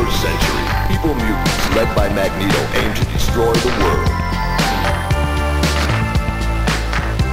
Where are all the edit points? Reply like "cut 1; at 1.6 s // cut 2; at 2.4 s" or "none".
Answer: none